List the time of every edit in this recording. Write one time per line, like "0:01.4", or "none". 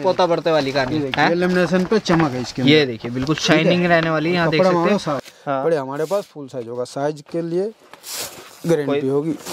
0:05.2